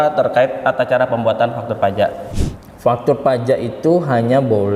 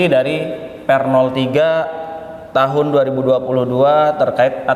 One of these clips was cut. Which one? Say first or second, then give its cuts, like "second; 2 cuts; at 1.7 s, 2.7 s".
first; 1 cut; at 2.2 s